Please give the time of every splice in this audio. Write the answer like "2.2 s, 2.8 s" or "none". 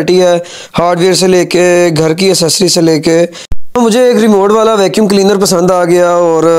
3.7 s